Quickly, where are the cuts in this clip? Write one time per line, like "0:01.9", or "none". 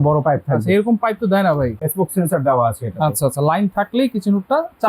0:01.8

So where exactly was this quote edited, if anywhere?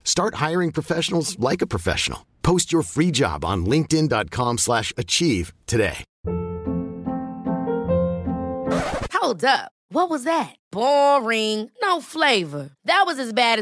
0:06.1

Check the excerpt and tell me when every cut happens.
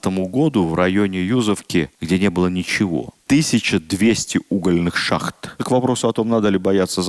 0:02.0
0:03.1
0:05.5

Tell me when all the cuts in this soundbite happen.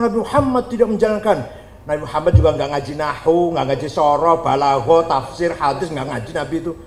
none

